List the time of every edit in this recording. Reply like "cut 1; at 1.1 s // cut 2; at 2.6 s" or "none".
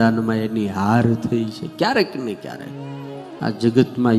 cut 1; at 3.3 s